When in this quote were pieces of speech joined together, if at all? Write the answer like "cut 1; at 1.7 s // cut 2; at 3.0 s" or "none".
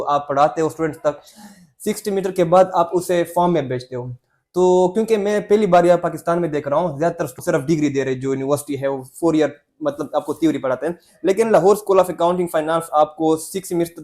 cut 1; at 7.3 s